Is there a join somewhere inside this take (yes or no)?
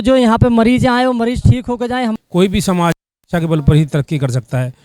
yes